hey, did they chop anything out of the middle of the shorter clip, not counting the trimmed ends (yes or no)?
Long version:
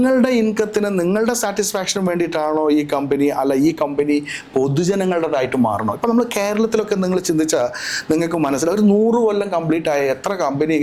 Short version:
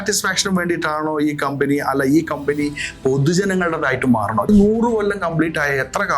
yes